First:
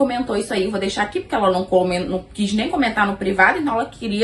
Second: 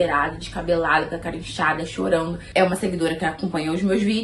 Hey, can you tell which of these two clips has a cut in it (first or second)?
second